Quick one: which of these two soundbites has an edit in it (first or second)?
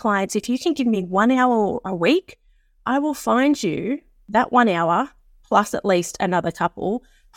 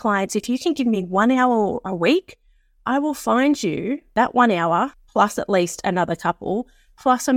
second